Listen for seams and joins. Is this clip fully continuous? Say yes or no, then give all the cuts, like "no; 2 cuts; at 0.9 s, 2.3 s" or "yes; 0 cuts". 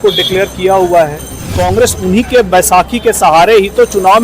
no; 1 cut; at 1.6 s